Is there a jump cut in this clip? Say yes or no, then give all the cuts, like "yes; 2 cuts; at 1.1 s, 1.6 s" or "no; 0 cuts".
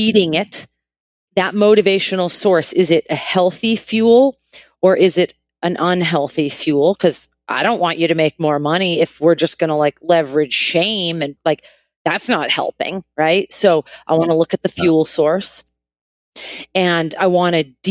yes; 2 cuts; at 1.3 s, 11.4 s